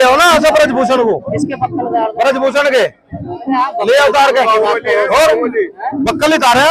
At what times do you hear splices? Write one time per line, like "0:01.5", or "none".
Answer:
none